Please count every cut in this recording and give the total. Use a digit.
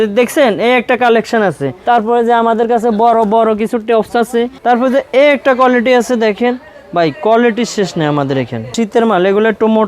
3